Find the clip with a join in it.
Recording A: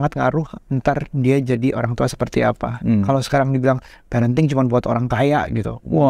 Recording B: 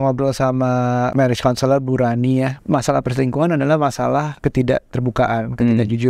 B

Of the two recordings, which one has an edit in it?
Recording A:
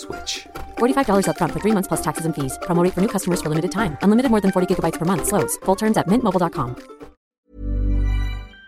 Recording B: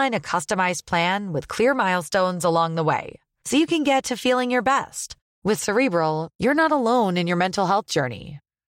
A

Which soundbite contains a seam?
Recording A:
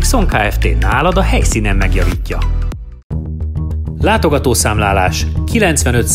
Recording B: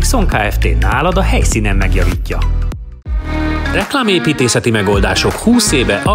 B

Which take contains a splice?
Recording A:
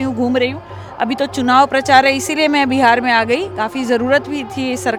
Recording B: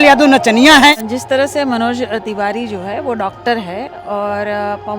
B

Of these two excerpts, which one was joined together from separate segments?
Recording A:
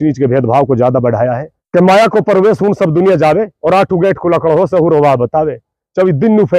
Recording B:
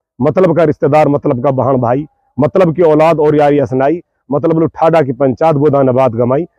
A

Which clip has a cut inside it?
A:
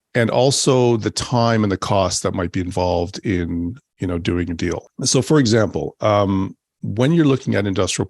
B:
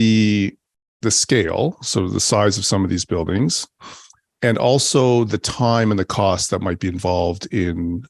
A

